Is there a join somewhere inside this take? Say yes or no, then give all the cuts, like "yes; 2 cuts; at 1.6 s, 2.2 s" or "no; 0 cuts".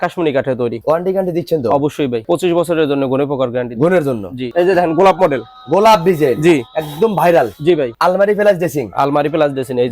yes; 4 cuts; at 0.8 s, 2.2 s, 4.5 s, 7.9 s